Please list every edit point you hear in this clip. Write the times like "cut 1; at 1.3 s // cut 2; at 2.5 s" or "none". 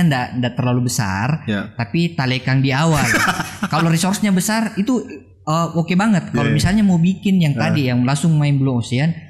none